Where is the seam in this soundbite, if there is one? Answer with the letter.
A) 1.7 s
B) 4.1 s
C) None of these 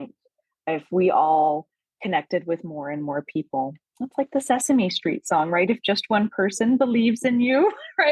C